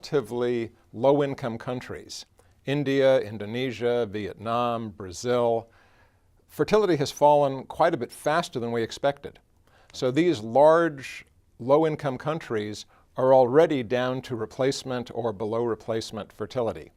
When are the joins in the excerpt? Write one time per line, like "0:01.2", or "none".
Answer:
0:03.3